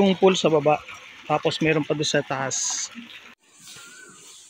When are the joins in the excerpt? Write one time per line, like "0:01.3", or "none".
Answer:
0:03.5